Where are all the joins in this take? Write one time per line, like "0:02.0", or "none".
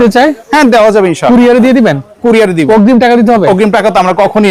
none